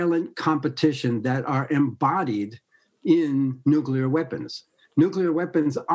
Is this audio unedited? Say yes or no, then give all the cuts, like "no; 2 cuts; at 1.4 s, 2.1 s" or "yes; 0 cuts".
yes; 0 cuts